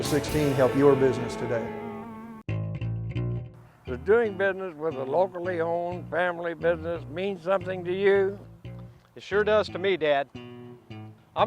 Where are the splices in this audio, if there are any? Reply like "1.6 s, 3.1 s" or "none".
2.0 s